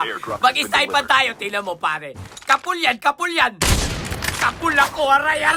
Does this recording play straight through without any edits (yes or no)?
yes